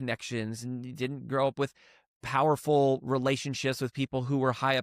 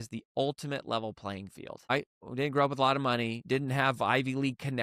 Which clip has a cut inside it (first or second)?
second